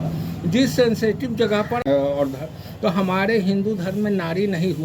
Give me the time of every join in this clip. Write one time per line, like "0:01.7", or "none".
0:01.9